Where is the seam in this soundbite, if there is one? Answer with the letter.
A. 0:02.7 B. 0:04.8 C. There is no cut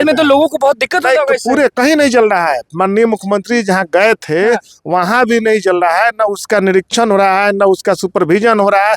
C